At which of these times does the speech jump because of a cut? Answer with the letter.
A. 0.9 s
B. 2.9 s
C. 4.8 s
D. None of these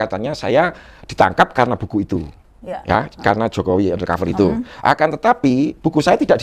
D